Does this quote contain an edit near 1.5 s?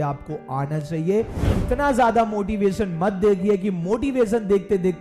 yes; 1 cut; at 1.5 s

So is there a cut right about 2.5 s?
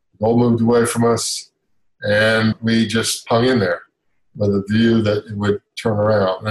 yes; 1 cut; at 2.5 s

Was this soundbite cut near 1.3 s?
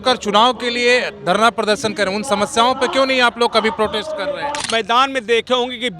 no; 1 cut; at 4.6 s

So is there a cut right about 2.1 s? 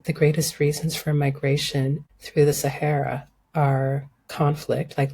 yes; 1 cut; at 2.1 s

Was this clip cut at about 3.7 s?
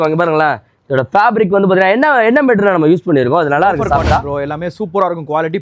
no; 0 cuts

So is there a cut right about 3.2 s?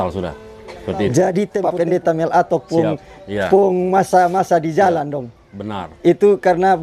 no; 1 cut; at 1.6 s

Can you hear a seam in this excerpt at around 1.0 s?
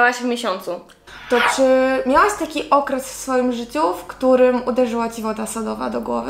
yes; 1 cut; at 1.0 s

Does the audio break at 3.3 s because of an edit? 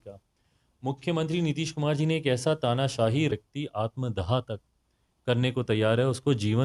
yes; 1 cut; at 3.3 s

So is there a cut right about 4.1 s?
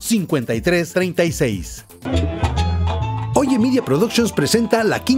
no; 1 cut; at 2.0 s

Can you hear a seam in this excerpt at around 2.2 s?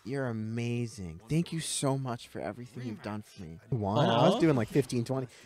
no; 1 cut; at 3.7 s

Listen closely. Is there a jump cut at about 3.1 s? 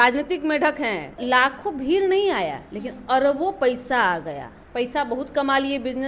no; 2 cuts; at 1.2 s, 4.5 s

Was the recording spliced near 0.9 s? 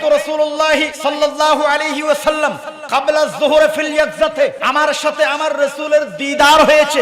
yes; 2 cuts; at 0.9 s, 4.6 s

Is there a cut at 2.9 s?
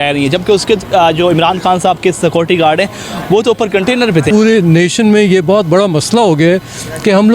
no; 1 cut; at 4.3 s

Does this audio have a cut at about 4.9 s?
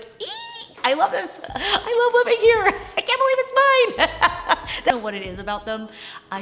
yes; 1 cut; at 4.9 s

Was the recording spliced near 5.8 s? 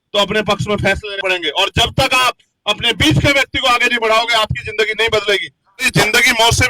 yes; 2 cuts; at 1.1 s, 5.8 s

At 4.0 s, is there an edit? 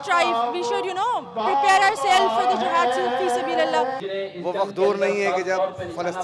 yes; 1 cut; at 4.0 s

